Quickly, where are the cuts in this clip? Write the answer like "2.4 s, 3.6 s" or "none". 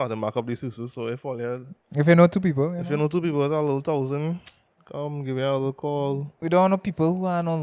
6.4 s